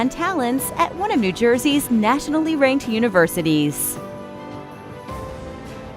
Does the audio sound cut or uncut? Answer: cut